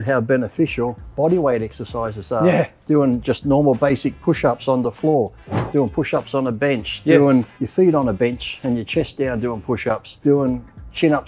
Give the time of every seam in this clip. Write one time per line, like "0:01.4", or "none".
0:01.0
0:07.6
0:10.1